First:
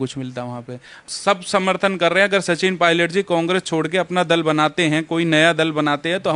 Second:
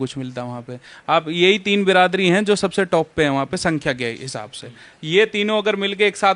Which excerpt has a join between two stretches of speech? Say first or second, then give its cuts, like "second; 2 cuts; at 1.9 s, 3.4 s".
first; 1 cut; at 1.0 s